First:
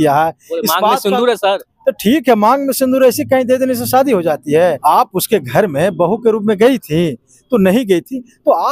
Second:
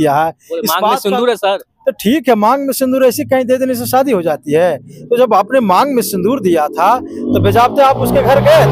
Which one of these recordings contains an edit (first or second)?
first